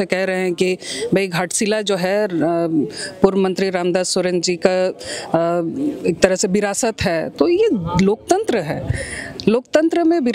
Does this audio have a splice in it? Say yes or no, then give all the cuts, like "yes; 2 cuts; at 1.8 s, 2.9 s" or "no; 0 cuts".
no; 0 cuts